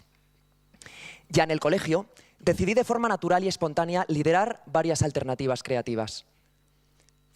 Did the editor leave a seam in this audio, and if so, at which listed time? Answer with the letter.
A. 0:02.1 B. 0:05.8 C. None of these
C